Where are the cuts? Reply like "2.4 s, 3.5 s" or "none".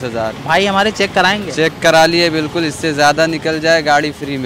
none